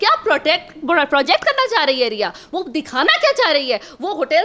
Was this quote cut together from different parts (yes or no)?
no